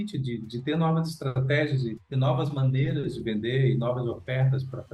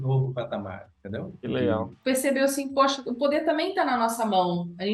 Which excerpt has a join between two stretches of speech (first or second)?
second